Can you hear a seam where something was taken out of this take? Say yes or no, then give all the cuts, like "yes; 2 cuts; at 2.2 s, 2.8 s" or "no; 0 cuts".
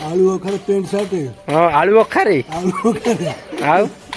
no; 0 cuts